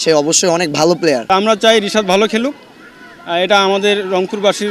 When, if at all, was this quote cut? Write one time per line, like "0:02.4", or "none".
0:01.2